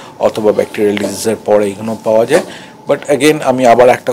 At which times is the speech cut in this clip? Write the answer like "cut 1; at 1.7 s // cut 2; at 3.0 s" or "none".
none